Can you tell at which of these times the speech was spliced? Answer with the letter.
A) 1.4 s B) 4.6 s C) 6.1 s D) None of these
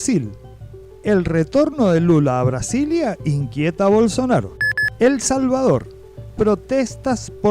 B